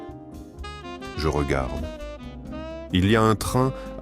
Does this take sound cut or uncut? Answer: cut